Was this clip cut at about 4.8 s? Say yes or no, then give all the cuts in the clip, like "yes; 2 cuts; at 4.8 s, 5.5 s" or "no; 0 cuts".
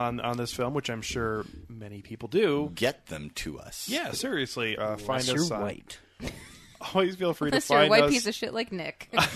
yes; 1 cut; at 4.8 s